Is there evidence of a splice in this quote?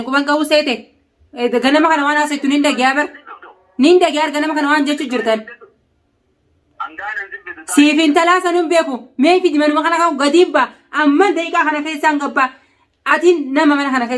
no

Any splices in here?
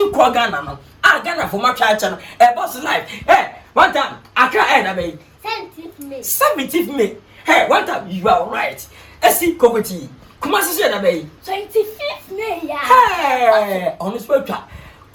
no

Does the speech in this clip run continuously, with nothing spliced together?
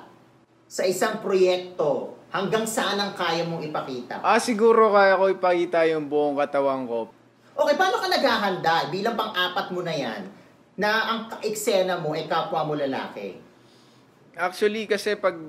no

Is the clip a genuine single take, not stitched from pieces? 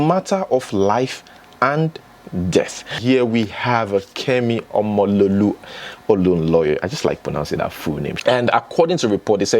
no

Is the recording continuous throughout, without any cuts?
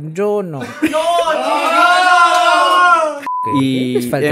no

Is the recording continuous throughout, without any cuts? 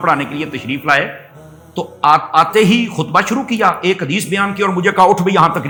yes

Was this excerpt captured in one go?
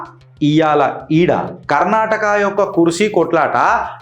no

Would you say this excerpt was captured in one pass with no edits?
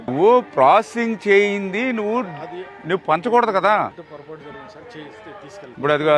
yes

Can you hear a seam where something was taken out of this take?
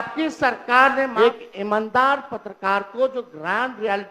yes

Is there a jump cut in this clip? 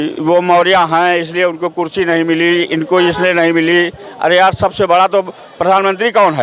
no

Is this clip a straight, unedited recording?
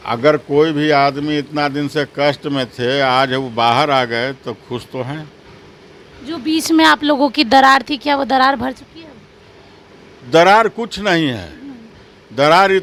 yes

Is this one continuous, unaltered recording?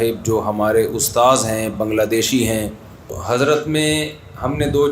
no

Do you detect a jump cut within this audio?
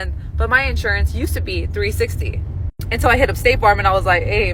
no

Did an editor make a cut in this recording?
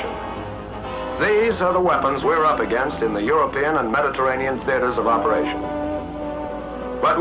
no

